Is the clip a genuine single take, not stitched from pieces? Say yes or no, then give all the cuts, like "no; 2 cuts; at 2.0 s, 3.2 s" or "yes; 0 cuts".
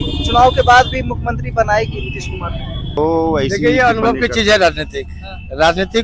no; 1 cut; at 2.9 s